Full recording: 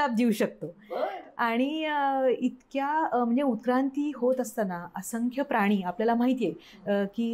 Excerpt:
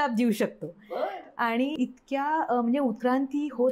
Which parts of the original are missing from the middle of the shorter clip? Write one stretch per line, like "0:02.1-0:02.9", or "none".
0:01.8-0:02.4